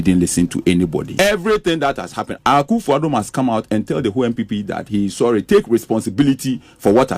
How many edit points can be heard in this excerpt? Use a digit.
2